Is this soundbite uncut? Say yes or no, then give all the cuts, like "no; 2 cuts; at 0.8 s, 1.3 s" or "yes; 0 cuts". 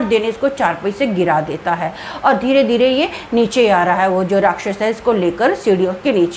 yes; 0 cuts